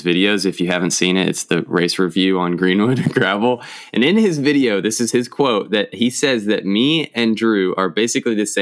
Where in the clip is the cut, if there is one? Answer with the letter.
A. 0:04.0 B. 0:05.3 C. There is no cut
C